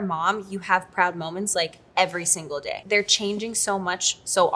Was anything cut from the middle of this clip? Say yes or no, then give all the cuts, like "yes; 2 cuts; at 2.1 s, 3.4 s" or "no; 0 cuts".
no; 0 cuts